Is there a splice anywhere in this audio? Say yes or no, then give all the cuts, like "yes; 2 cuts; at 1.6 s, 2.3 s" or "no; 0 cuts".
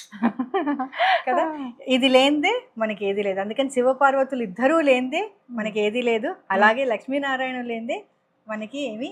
no; 0 cuts